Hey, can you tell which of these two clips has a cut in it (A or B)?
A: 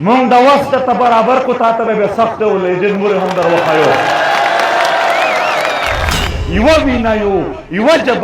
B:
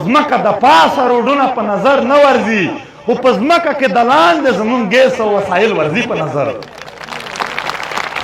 A